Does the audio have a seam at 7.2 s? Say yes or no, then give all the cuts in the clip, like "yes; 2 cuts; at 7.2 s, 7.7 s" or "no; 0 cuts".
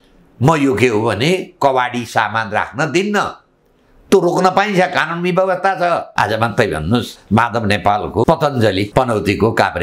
yes; 4 cuts; at 6.1 s, 7.2 s, 8.2 s, 8.9 s